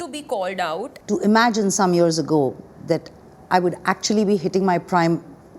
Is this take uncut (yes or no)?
no